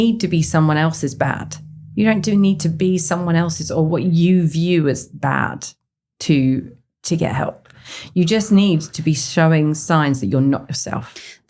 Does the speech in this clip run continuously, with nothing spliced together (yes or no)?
yes